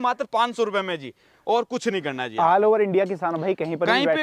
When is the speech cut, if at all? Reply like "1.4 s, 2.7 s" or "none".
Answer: none